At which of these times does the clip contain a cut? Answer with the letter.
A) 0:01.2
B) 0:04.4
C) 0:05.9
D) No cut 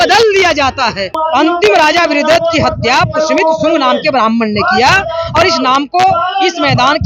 A